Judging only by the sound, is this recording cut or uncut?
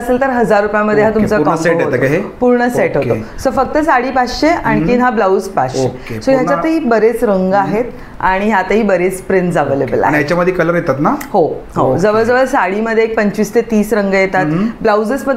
uncut